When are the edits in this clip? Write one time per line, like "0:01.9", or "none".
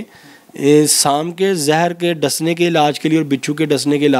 none